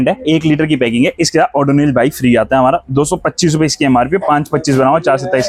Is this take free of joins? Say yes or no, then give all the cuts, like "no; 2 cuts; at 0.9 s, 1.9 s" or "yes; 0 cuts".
yes; 0 cuts